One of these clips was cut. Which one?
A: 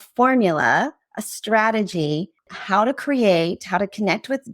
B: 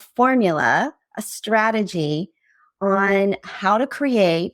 A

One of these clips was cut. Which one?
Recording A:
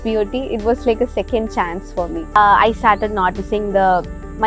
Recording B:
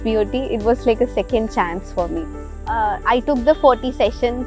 A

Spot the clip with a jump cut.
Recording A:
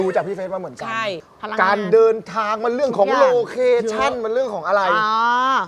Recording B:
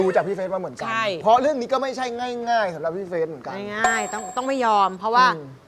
A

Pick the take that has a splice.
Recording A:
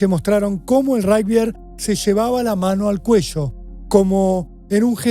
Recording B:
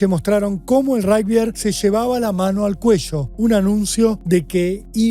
B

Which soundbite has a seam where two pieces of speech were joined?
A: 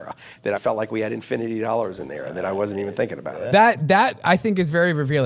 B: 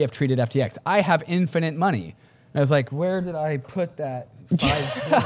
A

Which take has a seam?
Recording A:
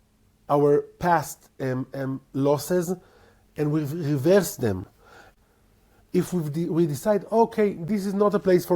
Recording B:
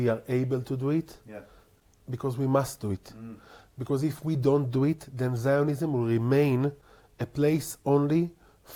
A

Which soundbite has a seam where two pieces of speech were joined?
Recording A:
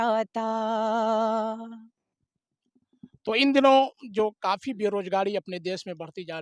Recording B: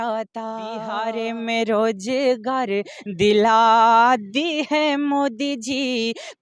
B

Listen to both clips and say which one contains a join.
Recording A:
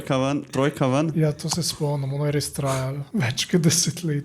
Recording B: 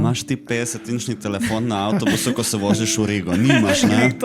A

